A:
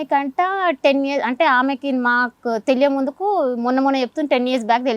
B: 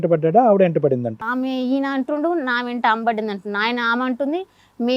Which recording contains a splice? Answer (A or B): B